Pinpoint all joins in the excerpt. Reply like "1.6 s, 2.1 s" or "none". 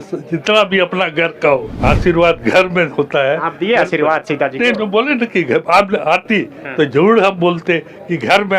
1.7 s